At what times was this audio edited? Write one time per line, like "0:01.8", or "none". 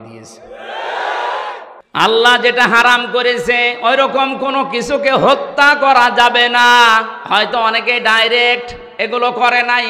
0:01.7